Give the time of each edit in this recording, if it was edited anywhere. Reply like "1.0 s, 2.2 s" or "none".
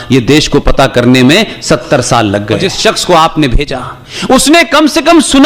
2.7 s